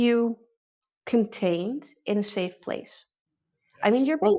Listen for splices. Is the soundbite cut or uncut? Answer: uncut